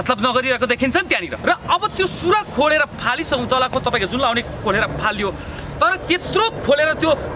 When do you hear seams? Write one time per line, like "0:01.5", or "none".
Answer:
0:01.3